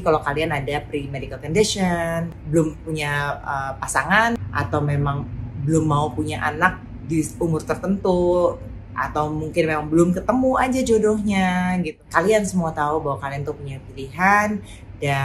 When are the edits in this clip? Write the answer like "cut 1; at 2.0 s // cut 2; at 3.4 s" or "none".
cut 1; at 2.3 s // cut 2; at 4.4 s // cut 3; at 11.9 s